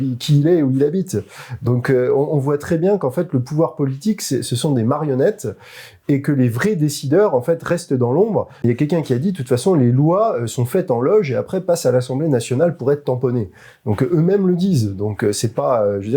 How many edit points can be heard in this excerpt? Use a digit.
1